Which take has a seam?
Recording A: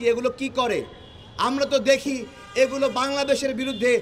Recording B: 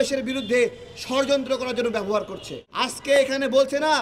B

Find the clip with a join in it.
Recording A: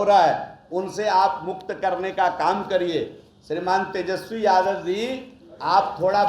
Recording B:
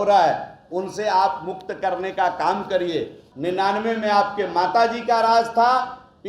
B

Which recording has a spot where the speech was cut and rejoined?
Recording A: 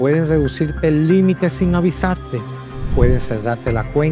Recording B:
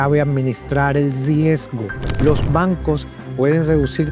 B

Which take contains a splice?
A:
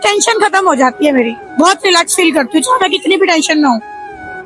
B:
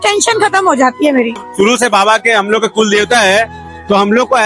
B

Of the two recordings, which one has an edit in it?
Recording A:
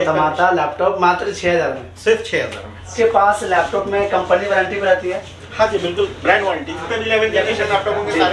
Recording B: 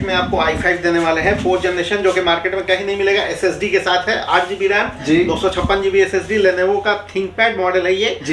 A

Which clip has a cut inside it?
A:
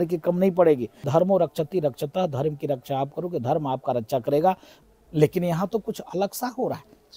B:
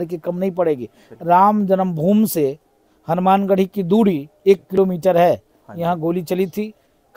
A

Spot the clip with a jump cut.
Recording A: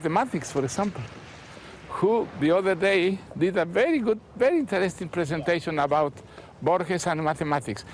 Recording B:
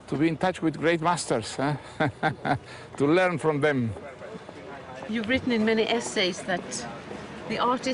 A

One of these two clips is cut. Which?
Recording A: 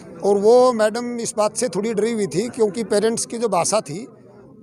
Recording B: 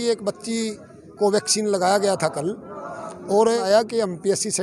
B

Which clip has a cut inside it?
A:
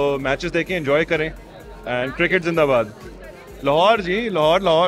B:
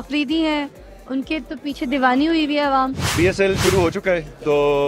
B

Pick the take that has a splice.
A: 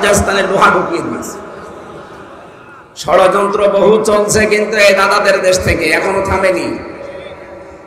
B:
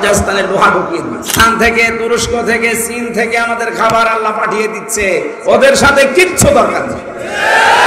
B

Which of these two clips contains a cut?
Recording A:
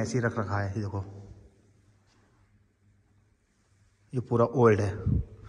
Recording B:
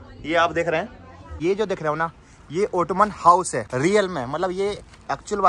B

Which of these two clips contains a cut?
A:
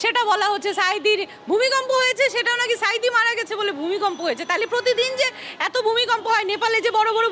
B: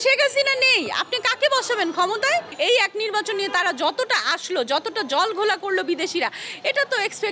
B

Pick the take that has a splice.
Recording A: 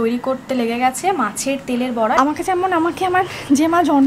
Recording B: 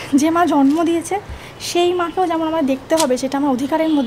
A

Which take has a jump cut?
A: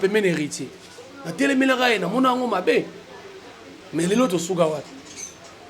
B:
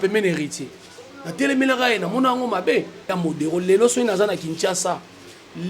B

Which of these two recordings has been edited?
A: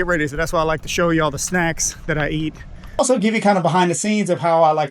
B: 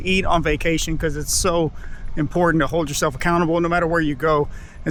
A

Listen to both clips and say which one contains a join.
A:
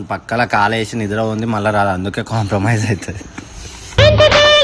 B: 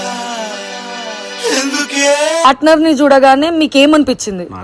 B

